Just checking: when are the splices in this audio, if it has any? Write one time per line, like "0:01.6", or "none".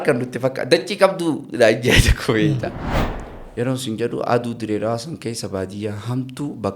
0:02.8